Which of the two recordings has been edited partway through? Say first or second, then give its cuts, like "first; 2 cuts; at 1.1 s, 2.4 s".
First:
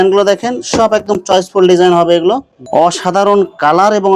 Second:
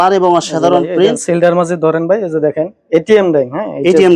first; 1 cut; at 2.5 s